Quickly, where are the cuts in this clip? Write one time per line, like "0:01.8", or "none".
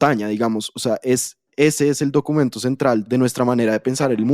0:03.0